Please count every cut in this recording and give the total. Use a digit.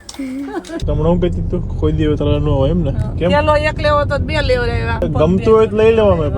3